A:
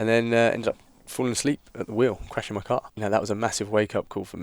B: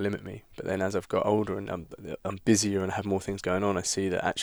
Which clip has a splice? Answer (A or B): A